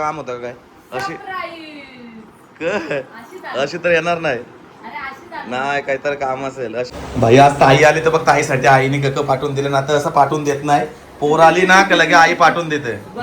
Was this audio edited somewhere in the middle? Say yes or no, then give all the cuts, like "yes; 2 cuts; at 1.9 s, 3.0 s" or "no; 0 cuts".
yes; 1 cut; at 6.9 s